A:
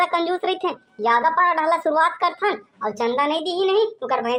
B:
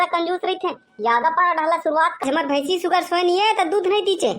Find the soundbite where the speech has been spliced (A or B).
B